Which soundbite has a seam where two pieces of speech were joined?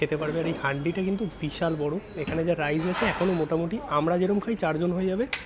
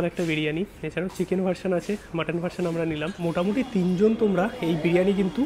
second; 1 cut; at 3.2 s

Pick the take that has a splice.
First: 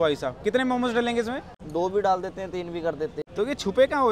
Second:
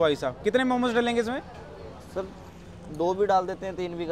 first; 2 cuts; at 1.5 s, 3.2 s

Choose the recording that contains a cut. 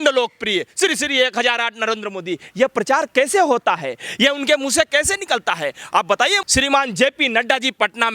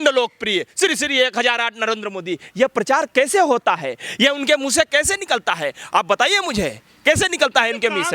first; 1 cut; at 6.4 s

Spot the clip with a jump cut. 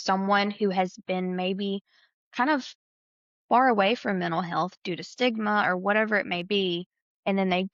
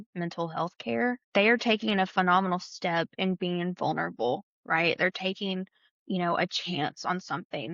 second; 1 cut; at 1.2 s

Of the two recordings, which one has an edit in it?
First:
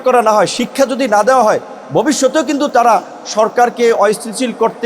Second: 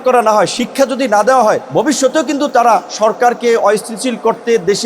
second; 2 cuts; at 1.6 s, 2.9 s

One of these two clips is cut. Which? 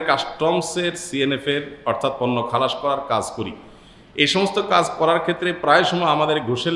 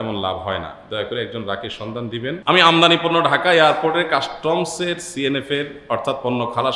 second; 1 cut; at 2.4 s

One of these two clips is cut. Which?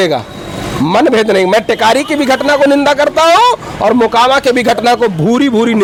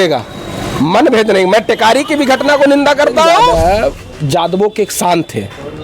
second; 1 cut; at 3.5 s

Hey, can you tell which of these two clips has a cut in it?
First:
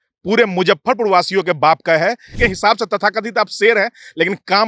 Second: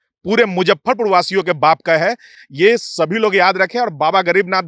first; 1 cut; at 2.4 s

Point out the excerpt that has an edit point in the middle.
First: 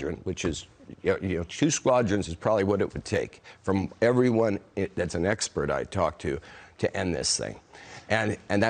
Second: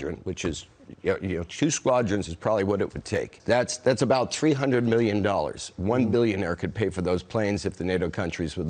second; 1 cut; at 3.3 s

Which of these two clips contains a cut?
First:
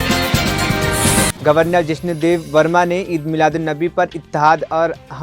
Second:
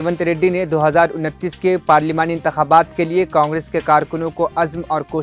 first; 1 cut; at 1.3 s

